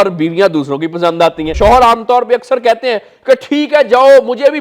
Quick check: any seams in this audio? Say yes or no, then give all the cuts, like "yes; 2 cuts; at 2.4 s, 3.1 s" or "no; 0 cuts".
yes; 1 cut; at 1.5 s